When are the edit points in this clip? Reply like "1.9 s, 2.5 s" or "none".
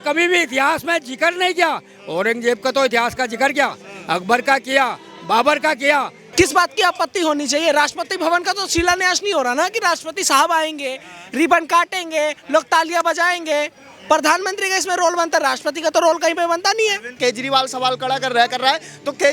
6.2 s, 17.1 s

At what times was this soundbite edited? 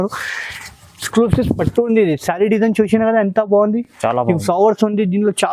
none

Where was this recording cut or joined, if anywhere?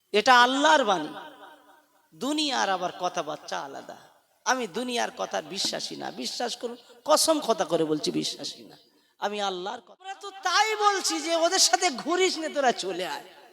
10.3 s

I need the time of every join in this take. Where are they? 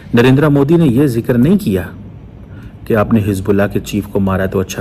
none

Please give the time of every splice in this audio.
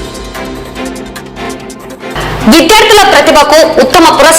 1.4 s

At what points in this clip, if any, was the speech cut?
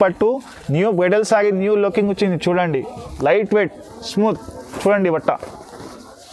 3.1 s

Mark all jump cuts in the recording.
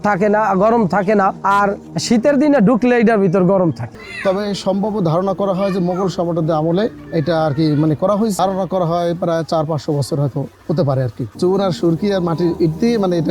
3.9 s, 8.4 s, 11.2 s

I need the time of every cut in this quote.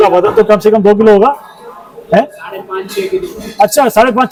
none

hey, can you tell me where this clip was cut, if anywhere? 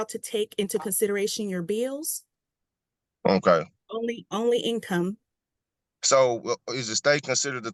none

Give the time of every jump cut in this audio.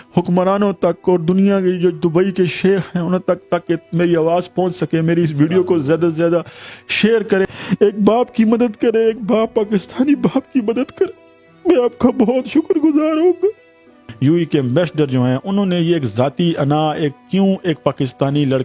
7.5 s, 14.0 s

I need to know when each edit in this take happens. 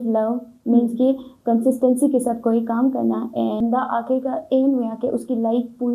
3.6 s

